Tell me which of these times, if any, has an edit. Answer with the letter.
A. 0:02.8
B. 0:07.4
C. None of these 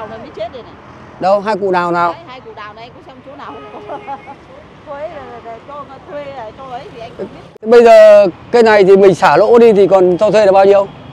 B